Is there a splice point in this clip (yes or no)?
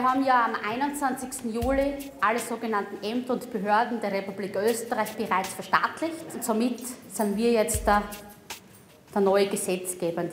yes